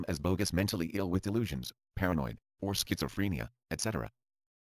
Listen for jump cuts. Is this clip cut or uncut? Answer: uncut